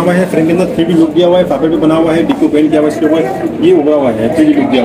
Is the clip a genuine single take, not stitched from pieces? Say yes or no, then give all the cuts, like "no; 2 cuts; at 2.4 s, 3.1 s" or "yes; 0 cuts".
yes; 0 cuts